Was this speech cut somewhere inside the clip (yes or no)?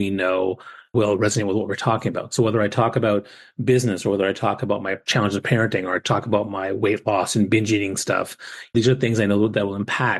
yes